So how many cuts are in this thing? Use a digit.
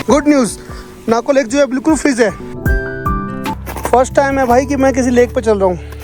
1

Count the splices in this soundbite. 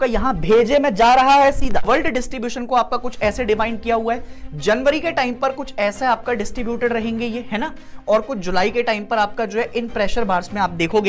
1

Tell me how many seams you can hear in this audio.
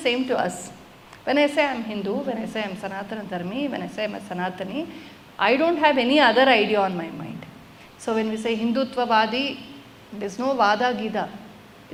0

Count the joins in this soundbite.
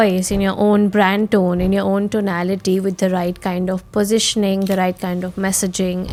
0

